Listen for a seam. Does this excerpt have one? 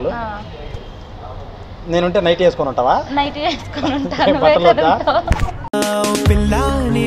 no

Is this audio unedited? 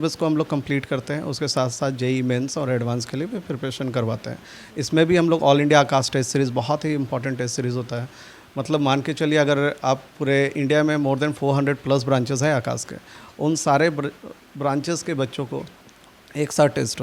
yes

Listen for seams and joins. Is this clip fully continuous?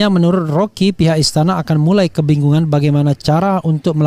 yes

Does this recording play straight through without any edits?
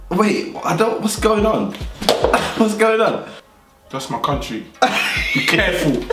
yes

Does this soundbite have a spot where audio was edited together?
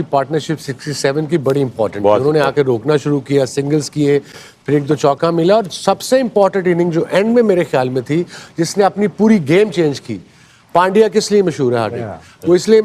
no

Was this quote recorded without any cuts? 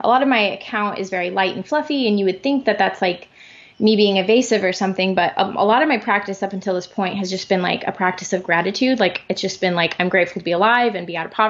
yes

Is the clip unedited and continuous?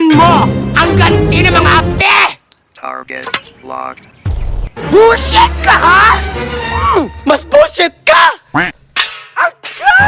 yes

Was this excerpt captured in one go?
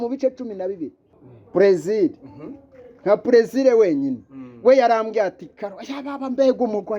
no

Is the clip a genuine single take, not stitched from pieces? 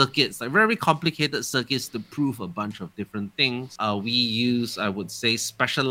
no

